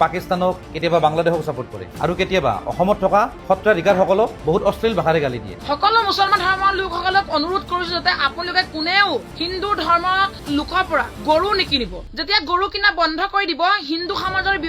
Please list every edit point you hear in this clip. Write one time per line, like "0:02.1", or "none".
0:05.5